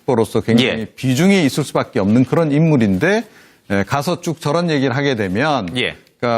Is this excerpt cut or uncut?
cut